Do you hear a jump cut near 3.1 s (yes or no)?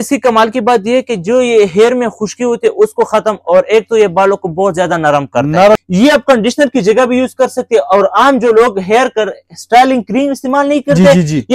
no